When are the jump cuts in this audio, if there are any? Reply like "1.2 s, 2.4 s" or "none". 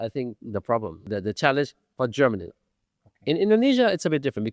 1.1 s